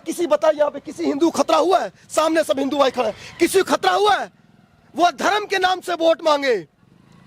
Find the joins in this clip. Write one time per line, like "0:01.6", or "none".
none